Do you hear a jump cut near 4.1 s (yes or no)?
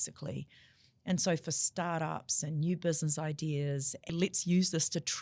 yes